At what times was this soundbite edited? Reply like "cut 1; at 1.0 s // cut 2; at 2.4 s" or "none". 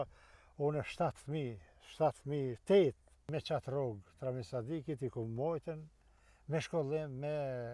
cut 1; at 3.2 s